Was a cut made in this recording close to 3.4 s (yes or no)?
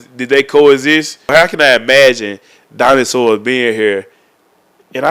no